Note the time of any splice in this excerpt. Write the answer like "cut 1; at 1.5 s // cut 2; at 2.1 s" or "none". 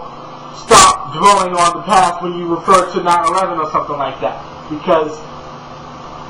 none